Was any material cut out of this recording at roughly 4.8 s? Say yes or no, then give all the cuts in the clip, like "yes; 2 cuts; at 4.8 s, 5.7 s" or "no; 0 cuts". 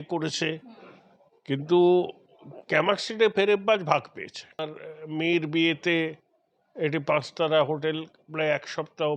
yes; 1 cut; at 4.8 s